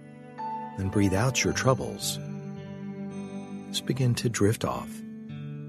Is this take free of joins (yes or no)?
no